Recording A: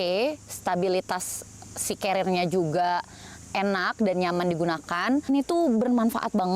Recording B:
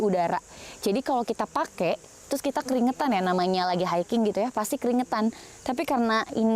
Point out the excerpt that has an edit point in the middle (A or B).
A